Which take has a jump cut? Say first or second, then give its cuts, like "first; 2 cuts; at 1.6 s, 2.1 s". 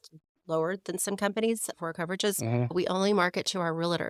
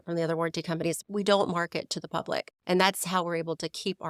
second; 2 cuts; at 1.0 s, 2.5 s